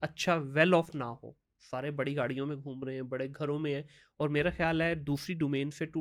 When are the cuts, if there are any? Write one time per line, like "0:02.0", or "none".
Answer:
none